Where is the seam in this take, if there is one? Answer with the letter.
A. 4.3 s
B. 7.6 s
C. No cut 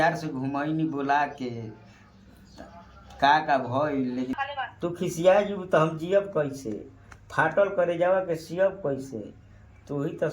A